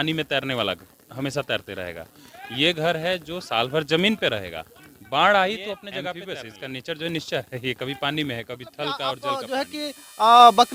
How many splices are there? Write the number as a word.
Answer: two